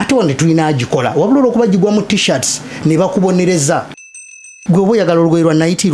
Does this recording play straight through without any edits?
no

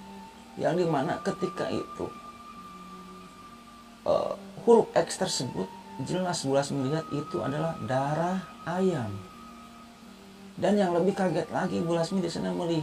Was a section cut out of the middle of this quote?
no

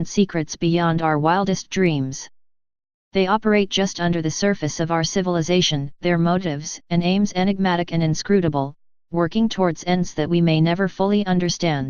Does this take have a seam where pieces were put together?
yes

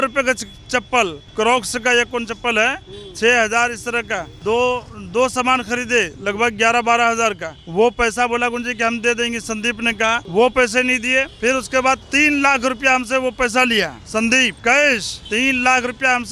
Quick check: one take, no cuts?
yes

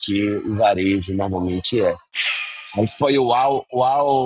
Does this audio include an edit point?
yes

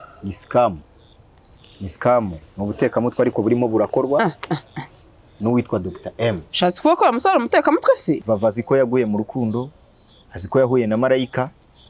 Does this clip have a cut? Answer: yes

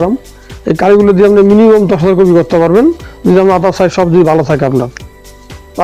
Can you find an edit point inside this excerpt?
no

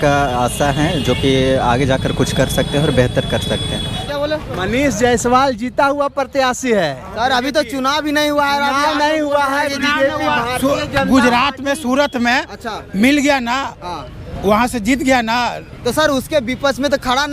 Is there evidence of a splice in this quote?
yes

